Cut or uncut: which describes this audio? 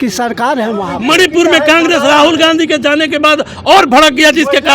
cut